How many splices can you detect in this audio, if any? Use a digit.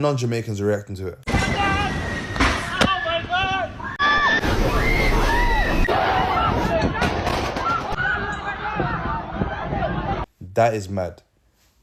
0